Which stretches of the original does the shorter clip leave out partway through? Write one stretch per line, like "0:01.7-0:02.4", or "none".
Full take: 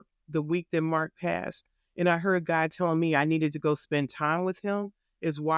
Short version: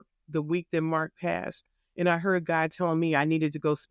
none